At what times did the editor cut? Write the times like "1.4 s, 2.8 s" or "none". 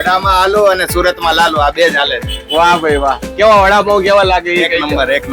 none